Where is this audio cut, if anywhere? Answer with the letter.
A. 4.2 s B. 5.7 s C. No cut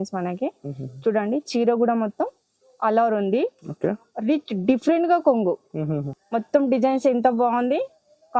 B